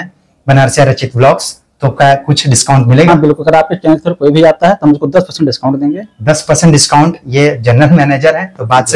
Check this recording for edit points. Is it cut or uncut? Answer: uncut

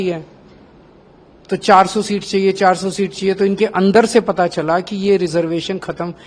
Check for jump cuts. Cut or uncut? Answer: uncut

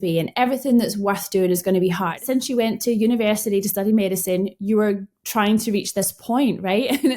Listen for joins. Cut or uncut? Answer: cut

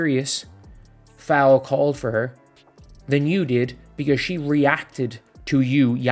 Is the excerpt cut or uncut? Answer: uncut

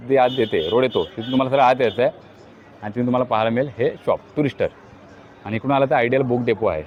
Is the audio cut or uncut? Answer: uncut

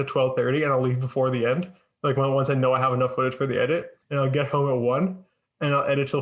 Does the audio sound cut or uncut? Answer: cut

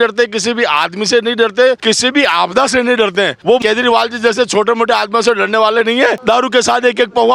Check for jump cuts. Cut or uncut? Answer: cut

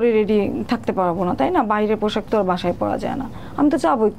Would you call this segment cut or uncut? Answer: uncut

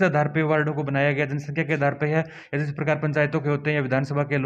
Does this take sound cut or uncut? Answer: uncut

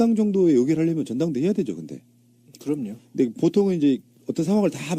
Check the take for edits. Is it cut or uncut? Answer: uncut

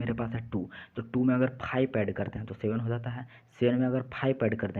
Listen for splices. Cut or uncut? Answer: uncut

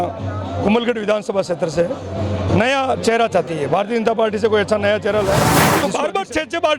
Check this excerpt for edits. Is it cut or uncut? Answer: cut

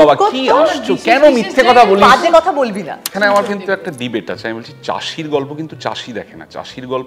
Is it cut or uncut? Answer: cut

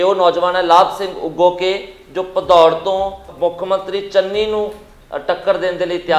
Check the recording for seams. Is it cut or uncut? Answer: cut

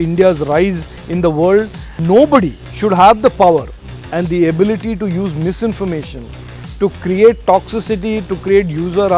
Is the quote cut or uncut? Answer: cut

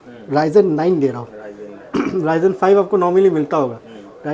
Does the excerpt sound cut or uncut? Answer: uncut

